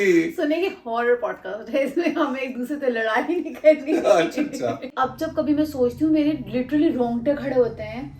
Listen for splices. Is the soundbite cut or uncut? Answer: cut